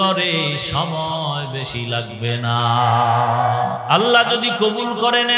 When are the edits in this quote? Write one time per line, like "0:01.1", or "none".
0:03.8